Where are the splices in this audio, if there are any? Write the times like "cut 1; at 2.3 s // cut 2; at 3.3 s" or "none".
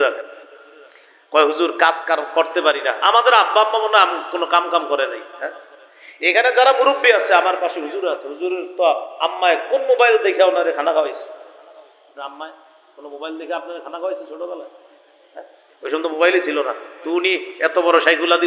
none